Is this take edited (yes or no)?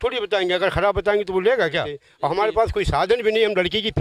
yes